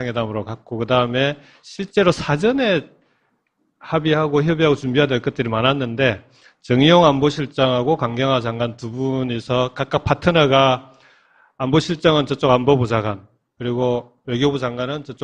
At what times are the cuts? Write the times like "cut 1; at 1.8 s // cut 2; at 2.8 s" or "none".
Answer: none